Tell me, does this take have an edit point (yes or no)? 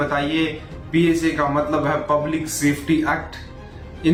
no